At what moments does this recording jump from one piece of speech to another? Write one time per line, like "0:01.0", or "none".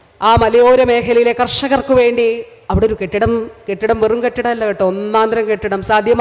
none